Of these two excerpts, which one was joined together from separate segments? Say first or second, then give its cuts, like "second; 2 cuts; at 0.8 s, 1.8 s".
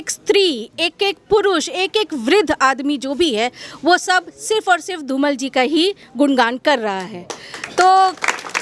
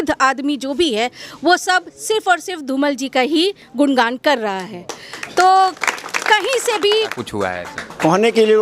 second; 1 cut; at 7.1 s